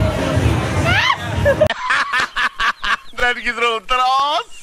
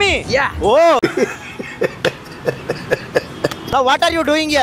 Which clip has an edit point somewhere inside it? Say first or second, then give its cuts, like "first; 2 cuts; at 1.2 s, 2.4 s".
second; 2 cuts; at 1.0 s, 3.6 s